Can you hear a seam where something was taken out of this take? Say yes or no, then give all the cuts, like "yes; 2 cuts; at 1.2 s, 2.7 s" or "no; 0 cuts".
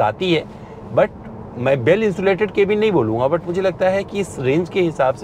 no; 0 cuts